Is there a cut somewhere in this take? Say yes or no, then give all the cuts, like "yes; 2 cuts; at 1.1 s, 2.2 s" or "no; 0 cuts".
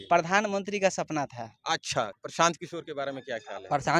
yes; 1 cut; at 2.2 s